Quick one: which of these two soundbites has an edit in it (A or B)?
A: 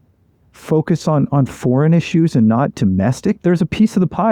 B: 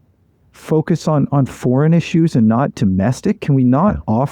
A